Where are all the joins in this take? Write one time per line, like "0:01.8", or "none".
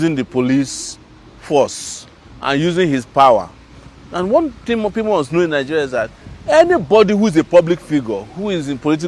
none